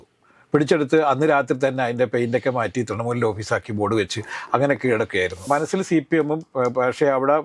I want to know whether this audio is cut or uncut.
cut